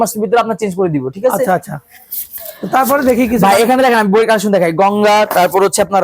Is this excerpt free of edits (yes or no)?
yes